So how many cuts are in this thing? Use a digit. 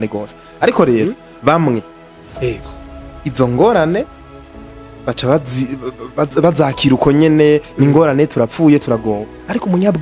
0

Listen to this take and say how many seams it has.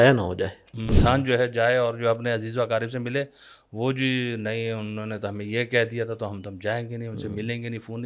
1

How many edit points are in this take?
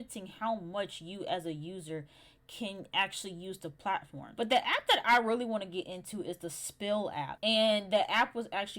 2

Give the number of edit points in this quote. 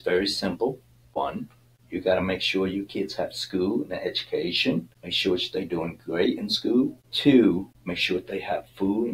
4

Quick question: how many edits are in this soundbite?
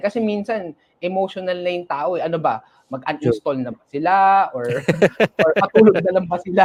0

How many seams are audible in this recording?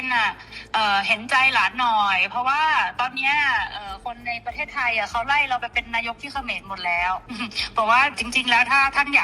2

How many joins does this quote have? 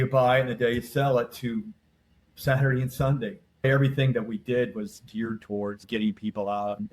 1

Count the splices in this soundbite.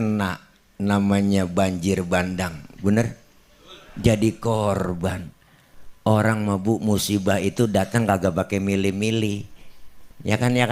0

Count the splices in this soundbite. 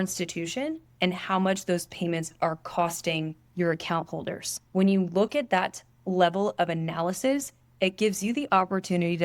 3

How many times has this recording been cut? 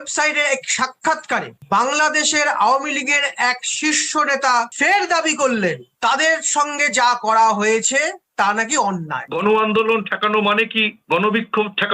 1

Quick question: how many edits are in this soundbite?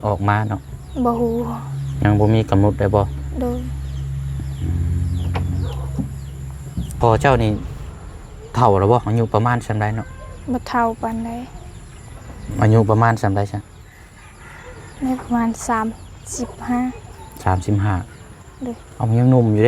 1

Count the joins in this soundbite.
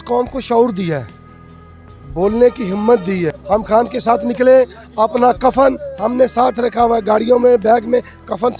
1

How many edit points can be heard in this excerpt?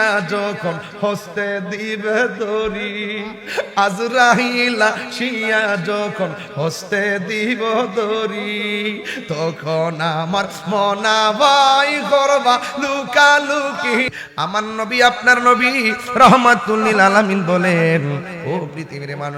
1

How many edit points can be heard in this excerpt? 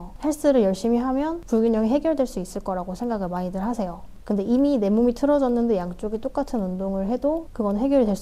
0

